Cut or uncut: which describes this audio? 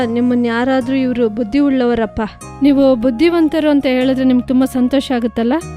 uncut